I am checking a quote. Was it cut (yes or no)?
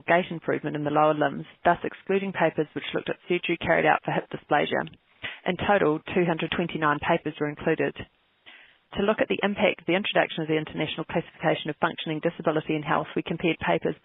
yes